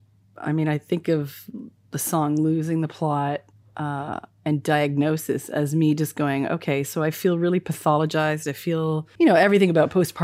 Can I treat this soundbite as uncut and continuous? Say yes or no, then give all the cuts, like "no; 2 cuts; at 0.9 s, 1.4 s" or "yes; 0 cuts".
no; 1 cut; at 9.1 s